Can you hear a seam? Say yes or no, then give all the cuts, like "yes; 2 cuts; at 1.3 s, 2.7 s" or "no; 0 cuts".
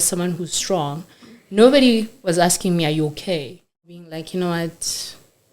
yes; 1 cut; at 3.8 s